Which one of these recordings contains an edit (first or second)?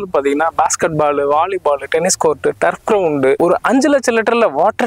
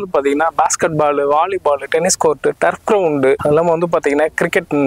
first